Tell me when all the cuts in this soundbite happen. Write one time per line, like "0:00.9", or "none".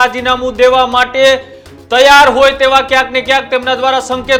none

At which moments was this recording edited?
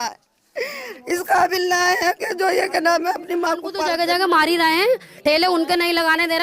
0:03.8

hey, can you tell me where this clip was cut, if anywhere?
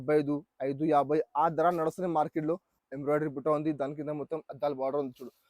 0:02.7

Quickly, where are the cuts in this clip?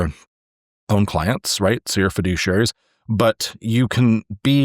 none

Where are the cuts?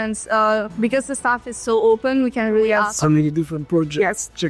0:02.9

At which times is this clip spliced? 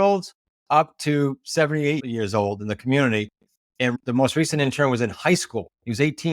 0:04.0

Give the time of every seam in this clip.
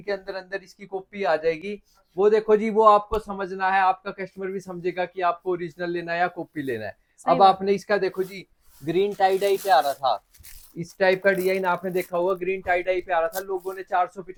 none

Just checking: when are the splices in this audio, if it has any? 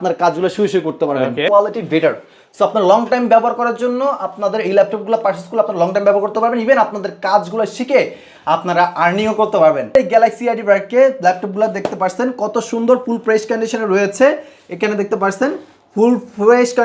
0:01.5
0:10.0

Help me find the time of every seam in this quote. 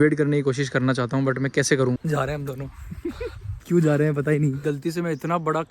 0:02.0
0:04.6

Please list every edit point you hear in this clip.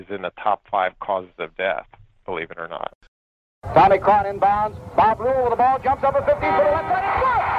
0:03.2

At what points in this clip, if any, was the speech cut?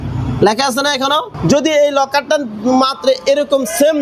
0:01.3

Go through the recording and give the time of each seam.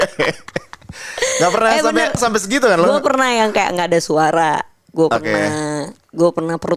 none

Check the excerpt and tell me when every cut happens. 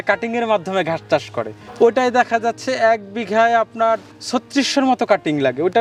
none

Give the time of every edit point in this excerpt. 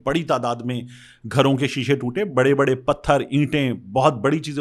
none

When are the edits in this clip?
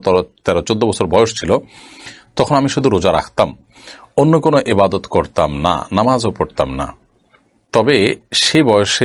none

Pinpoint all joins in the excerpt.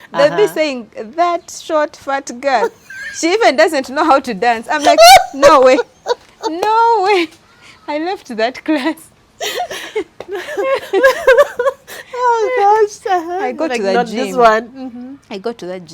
none

